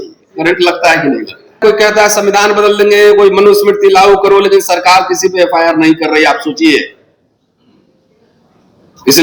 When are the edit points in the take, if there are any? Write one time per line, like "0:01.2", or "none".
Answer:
none